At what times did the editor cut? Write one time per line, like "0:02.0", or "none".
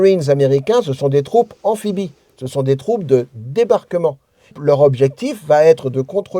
0:04.6